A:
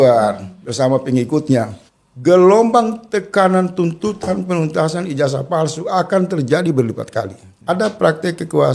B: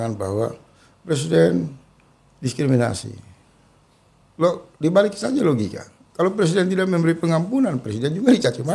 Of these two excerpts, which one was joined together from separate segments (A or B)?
A